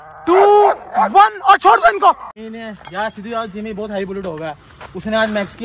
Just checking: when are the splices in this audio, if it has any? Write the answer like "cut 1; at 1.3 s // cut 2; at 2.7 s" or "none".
cut 1; at 2.3 s